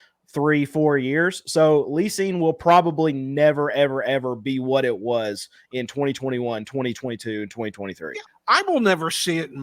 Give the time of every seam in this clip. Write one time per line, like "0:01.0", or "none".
0:08.1